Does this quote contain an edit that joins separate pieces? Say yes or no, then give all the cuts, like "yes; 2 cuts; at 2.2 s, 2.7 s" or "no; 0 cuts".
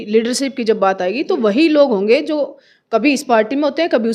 no; 0 cuts